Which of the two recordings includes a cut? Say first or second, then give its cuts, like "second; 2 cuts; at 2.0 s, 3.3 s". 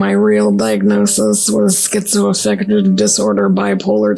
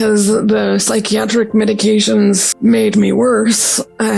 second; 1 cut; at 2.5 s